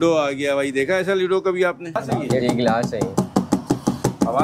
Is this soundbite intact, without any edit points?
no; 1 cut; at 2.0 s

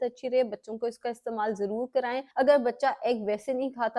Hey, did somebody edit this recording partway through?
yes; 1 cut; at 2.3 s

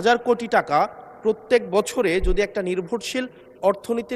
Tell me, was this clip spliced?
no; 0 cuts

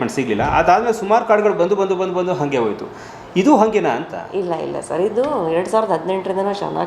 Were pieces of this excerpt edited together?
no; 0 cuts

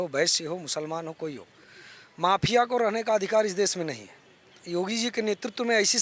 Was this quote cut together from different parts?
yes; 1 cut; at 4.6 s

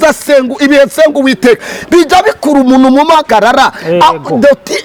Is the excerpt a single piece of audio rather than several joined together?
yes; 0 cuts

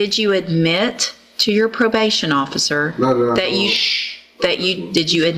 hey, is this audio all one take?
yes; 0 cuts

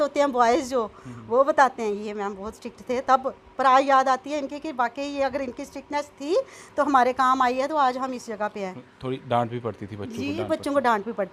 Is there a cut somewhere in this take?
no; 0 cuts

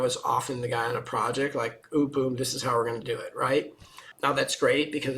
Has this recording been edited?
yes; 1 cut; at 4.1 s

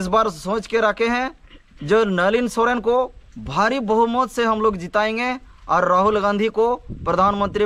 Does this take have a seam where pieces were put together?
no; 0 cuts

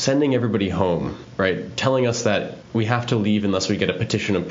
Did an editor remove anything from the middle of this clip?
yes; 2 cuts; at 1.2 s, 2.6 s

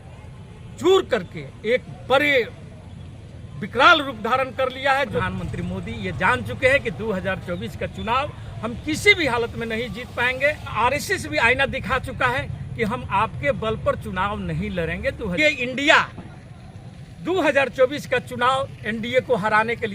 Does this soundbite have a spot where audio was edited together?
yes; 3 cuts; at 5.2 s, 10.7 s, 15.4 s

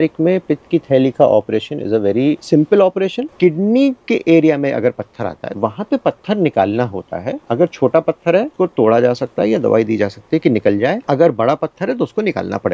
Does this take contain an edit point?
yes; 6 cuts; at 2.4 s, 3.3 s, 5.4 s, 7.4 s, 8.5 s, 11.0 s

